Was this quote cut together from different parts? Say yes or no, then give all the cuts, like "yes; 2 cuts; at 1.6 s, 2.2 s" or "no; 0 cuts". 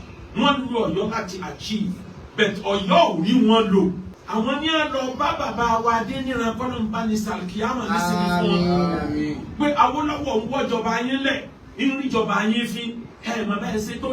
yes; 1 cut; at 4.1 s